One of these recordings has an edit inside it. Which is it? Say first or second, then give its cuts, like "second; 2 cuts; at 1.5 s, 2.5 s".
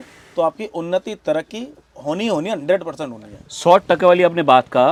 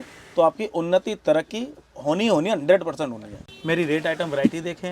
second; 1 cut; at 3.4 s